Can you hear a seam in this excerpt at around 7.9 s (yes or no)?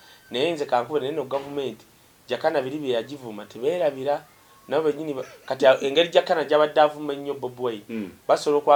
no